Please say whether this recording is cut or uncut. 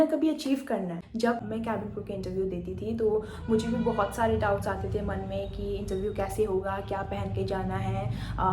cut